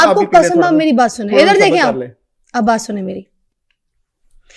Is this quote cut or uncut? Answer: uncut